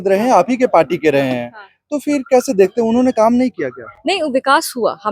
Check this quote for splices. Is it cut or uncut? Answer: uncut